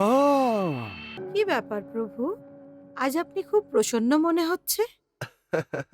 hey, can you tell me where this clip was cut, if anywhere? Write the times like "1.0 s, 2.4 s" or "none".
1.1 s